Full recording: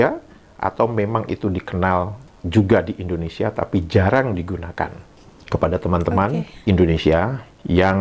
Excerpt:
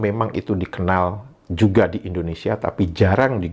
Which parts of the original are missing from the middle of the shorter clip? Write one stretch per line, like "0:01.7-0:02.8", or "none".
none